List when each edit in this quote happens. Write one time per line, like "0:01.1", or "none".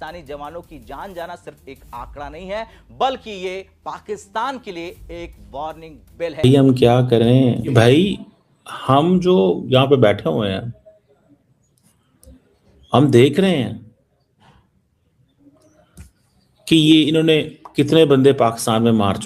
0:06.4